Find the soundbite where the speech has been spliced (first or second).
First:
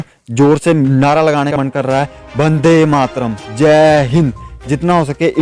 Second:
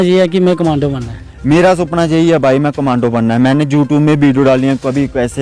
first